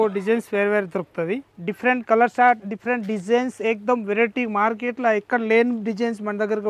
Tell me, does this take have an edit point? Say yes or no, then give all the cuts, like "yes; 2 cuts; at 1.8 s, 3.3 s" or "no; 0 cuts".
yes; 1 cut; at 1.5 s